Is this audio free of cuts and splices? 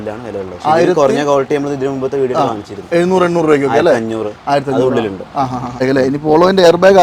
no; 1 cut; at 5.8 s

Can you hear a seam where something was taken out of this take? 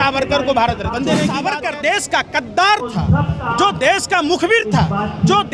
yes; 1 cut; at 1.4 s

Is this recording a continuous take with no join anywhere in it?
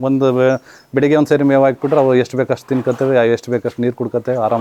yes; 0 cuts

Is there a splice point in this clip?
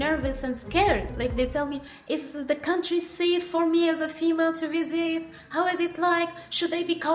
yes; 1 cut; at 1.1 s

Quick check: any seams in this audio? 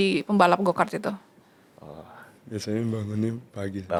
no; 0 cuts

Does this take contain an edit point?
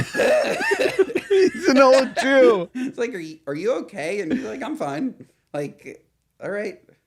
no; 0 cuts

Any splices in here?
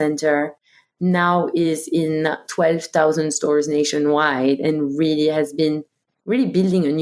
no; 0 cuts

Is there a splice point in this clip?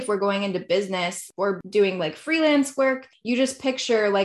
yes; 2 cuts; at 1.3 s, 3.1 s

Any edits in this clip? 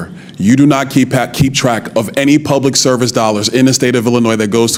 no; 0 cuts

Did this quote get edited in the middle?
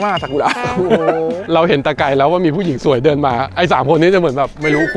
yes; 1 cut; at 1.4 s

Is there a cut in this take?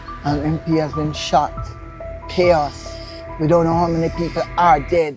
no; 0 cuts

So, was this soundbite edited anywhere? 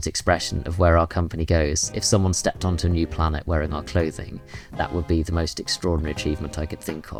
no; 0 cuts

